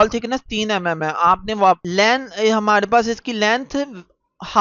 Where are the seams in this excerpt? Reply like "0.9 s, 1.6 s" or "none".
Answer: 1.8 s